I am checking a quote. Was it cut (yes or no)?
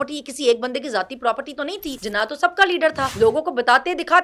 yes